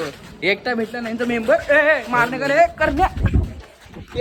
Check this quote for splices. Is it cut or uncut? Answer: uncut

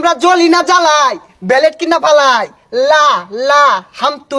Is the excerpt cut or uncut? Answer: uncut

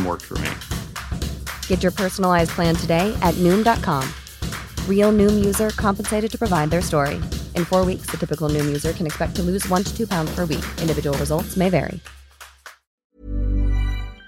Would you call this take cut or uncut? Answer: cut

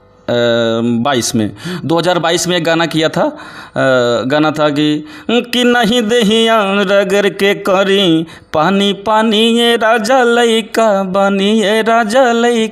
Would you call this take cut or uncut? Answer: uncut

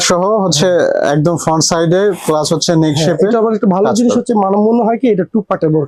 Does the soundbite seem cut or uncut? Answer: uncut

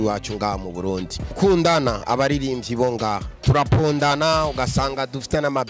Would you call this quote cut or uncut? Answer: cut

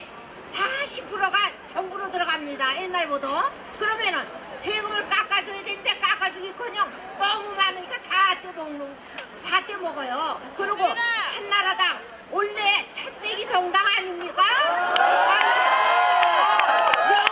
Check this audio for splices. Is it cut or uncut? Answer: cut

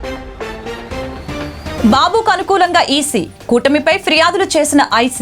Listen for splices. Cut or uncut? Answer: cut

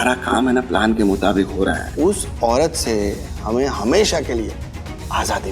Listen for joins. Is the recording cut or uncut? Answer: cut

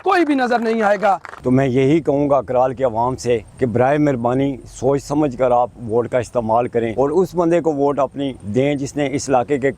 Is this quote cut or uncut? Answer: cut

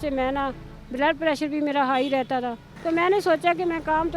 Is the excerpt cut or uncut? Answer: cut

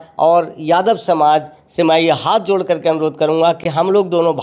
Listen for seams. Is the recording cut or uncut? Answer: uncut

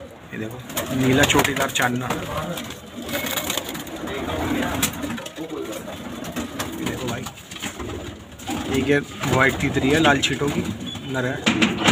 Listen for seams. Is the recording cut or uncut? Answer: uncut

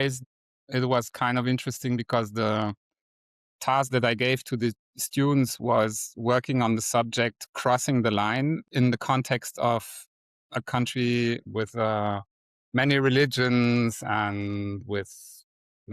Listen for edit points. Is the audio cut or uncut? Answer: cut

